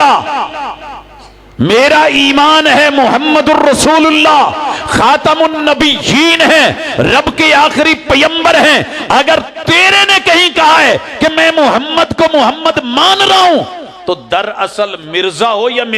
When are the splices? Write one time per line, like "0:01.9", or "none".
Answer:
none